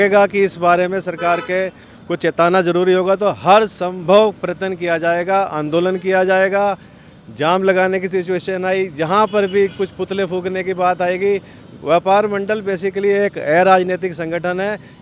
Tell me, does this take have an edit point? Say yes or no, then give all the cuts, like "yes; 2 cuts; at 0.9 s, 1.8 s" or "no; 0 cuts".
no; 0 cuts